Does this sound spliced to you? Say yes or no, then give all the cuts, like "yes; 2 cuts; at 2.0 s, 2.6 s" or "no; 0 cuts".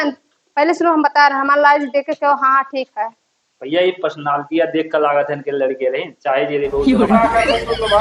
no; 0 cuts